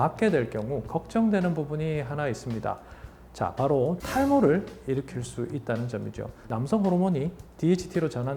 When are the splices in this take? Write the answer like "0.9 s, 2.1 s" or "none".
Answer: 4.0 s, 6.4 s